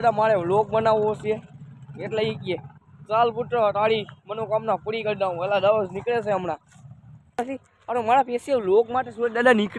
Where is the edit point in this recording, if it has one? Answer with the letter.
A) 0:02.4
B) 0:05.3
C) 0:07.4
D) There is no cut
C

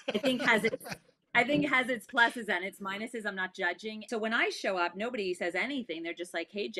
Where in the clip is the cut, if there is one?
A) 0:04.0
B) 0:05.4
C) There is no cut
A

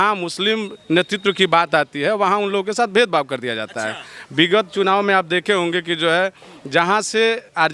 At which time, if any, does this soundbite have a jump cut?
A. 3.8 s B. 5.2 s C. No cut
C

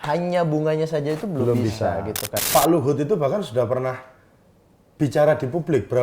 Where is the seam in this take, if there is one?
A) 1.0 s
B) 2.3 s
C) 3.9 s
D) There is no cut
B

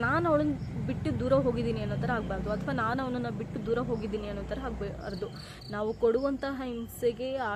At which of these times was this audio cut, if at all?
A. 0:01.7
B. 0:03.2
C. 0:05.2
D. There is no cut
D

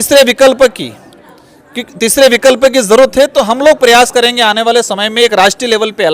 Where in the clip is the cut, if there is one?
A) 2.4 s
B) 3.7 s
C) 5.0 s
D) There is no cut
D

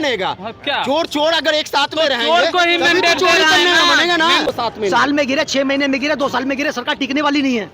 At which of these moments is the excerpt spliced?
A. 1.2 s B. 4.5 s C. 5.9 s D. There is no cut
B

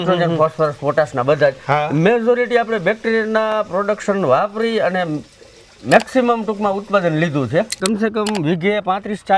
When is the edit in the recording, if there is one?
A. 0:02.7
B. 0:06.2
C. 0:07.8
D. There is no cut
C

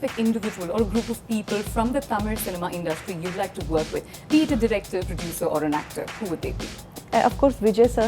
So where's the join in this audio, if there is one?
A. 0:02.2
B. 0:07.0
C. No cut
B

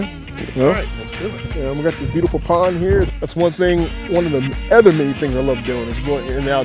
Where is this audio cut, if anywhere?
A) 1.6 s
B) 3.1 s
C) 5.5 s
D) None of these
B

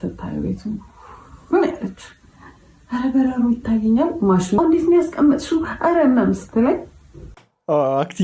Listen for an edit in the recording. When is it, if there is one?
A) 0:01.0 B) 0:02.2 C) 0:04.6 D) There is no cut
C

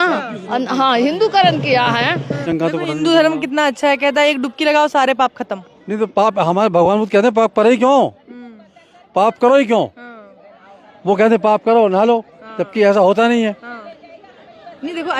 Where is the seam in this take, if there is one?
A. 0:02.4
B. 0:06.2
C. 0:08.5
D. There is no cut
A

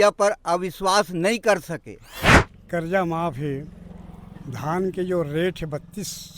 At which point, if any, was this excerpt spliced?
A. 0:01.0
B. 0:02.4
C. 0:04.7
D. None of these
B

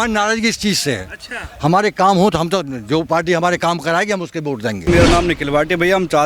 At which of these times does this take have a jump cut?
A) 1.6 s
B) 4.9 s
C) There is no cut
B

